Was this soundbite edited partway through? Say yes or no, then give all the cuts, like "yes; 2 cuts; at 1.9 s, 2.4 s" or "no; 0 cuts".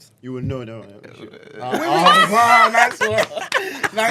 no; 0 cuts